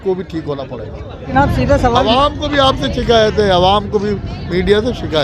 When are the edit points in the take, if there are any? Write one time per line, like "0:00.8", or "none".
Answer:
0:01.1